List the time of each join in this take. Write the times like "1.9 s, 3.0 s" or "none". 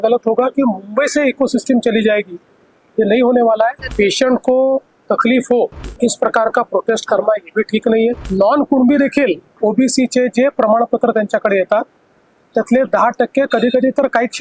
3.8 s, 8.2 s